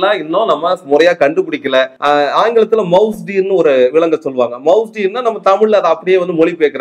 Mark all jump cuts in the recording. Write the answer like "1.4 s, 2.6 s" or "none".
2.0 s